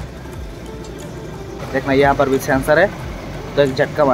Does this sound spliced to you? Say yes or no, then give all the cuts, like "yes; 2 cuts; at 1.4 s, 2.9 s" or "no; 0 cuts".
yes; 1 cut; at 1.6 s